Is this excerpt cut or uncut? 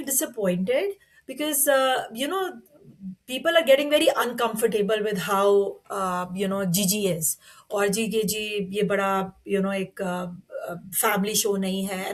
uncut